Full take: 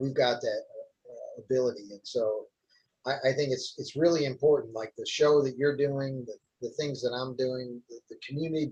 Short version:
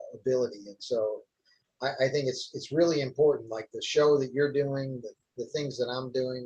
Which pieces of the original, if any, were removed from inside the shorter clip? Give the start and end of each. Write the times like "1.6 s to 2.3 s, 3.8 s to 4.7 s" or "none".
none